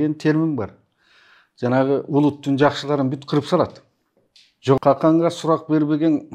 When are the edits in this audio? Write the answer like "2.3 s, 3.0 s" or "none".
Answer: 4.8 s